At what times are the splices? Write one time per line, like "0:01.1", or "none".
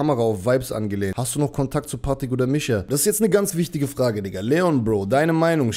0:01.2
0:02.8